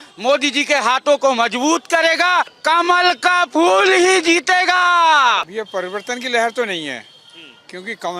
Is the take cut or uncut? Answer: cut